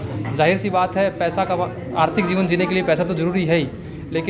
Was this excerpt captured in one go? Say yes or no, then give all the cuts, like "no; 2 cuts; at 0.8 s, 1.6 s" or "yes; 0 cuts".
yes; 0 cuts